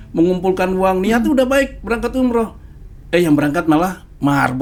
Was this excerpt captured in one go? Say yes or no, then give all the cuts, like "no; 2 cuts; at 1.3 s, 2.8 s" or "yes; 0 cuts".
yes; 0 cuts